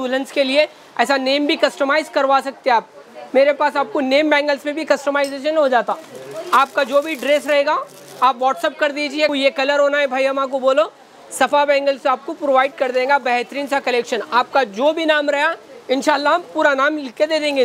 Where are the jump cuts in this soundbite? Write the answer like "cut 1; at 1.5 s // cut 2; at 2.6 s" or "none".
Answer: none